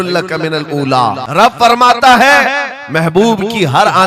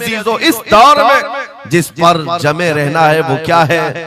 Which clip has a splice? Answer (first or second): first